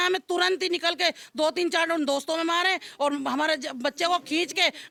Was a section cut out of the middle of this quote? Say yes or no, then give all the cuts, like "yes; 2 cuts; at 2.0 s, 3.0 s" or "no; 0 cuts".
no; 0 cuts